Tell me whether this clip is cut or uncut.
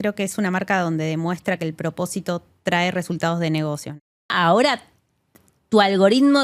cut